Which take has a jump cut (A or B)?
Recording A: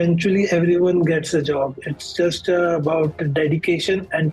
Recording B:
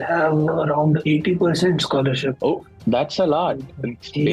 B